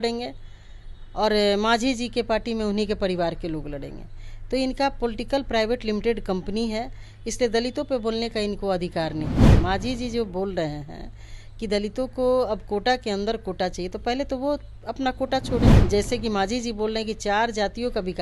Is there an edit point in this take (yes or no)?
yes